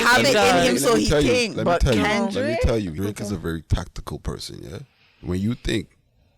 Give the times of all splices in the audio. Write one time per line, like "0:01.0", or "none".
0:02.9
0:05.1